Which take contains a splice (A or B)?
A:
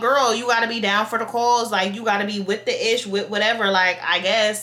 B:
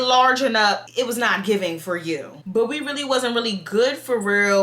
B